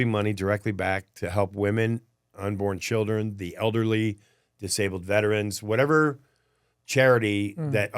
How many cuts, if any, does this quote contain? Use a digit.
0